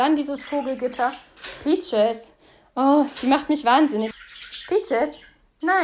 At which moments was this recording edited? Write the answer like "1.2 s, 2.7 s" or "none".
4.1 s